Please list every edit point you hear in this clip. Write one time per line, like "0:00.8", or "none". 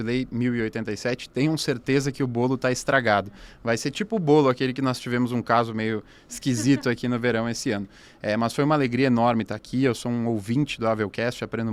none